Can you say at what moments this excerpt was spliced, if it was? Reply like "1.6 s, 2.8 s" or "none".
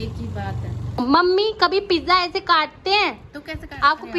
1.0 s